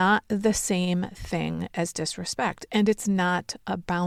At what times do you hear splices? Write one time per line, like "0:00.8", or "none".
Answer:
none

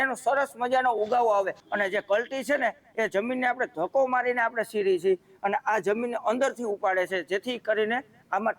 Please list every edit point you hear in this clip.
0:01.6

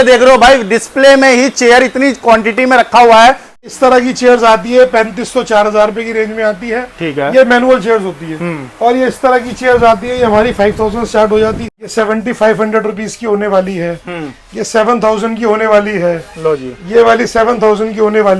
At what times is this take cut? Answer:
0:03.4
0:11.8

